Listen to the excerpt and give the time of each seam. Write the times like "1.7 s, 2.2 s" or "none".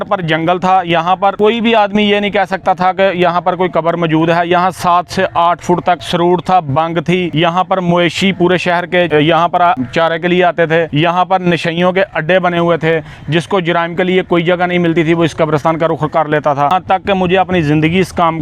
1.3 s, 6.1 s, 7.3 s, 9.1 s, 9.8 s, 10.9 s, 16.7 s